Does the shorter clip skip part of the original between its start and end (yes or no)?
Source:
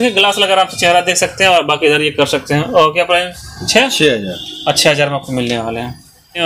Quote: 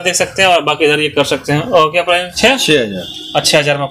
yes